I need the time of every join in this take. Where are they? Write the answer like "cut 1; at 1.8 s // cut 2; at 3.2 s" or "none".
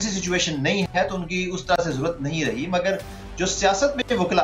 none